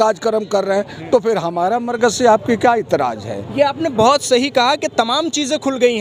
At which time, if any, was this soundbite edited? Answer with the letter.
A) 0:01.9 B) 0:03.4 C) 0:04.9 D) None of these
D